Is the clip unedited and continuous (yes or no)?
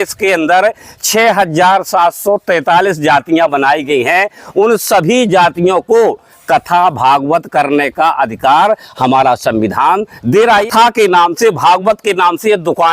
no